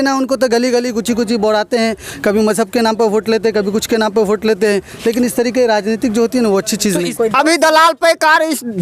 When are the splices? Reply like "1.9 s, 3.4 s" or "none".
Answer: 7.1 s